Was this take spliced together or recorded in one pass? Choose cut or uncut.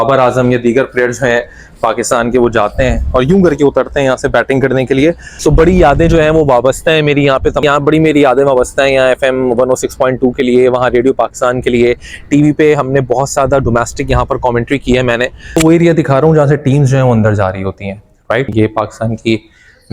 cut